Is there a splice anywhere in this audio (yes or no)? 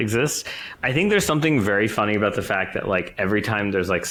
no